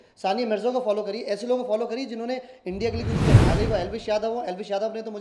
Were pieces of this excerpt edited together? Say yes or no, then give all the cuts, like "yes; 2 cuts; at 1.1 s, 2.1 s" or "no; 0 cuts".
yes; 1 cut; at 3.4 s